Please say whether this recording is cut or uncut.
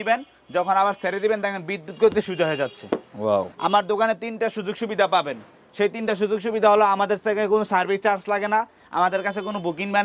cut